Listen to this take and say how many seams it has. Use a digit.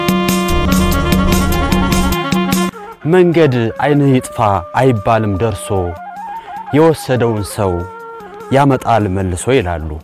1